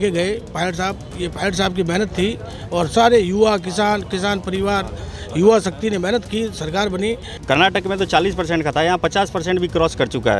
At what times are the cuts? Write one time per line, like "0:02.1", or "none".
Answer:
0:07.3

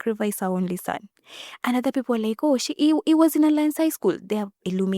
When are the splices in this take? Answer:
none

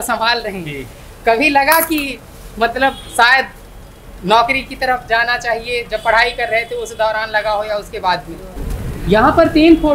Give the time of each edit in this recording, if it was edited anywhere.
0:08.4

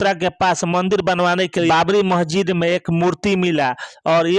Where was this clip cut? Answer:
0:01.7

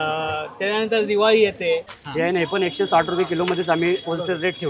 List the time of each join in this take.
0:02.0

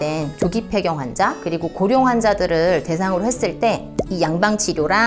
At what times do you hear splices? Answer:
0:03.9

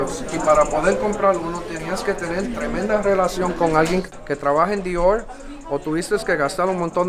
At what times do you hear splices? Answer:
0:04.1

